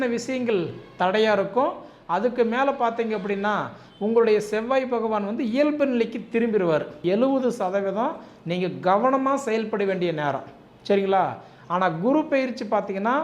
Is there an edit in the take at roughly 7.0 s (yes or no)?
yes